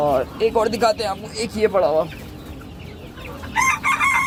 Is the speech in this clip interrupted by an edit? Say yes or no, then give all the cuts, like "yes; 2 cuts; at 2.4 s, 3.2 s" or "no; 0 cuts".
no; 0 cuts